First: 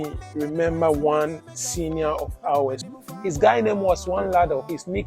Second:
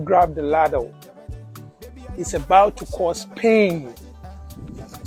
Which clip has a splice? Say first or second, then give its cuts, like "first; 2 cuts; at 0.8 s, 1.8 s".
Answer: first; 1 cut; at 2.8 s